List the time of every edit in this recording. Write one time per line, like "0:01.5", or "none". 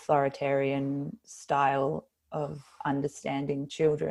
none